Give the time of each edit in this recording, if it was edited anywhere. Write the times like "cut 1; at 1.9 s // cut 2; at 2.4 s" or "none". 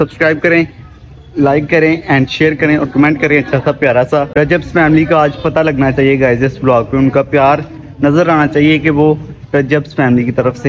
cut 1; at 4.3 s